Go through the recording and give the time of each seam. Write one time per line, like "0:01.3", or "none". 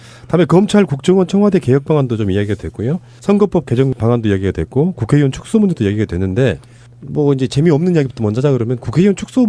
0:05.8